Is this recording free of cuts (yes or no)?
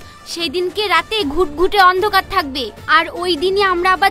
yes